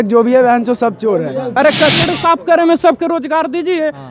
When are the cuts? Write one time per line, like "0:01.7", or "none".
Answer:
0:01.5